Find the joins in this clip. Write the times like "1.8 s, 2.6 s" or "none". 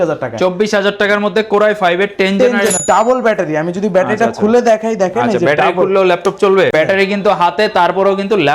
2.8 s, 6.7 s